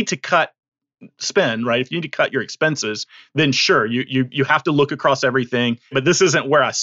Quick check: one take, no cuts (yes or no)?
no